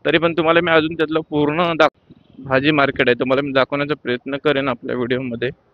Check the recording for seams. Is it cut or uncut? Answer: cut